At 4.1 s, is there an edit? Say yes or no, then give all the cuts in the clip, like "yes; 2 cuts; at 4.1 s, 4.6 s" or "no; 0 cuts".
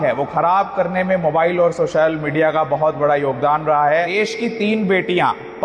yes; 1 cut; at 4.1 s